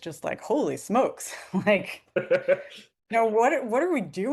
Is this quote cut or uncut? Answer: uncut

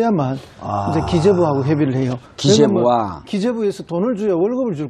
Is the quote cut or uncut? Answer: cut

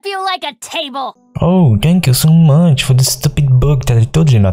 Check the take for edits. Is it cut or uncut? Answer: cut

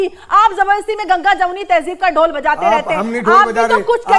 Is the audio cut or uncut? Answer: uncut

